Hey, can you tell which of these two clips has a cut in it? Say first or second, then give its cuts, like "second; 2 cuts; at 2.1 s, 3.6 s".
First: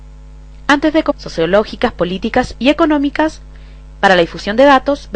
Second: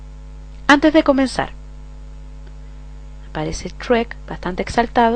second; 1 cut; at 1.1 s